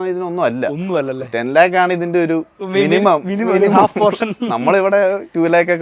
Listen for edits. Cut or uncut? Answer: uncut